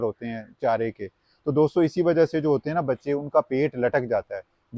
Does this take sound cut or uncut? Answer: uncut